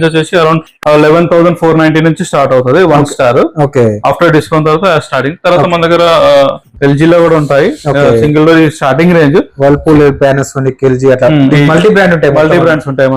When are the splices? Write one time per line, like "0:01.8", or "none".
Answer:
none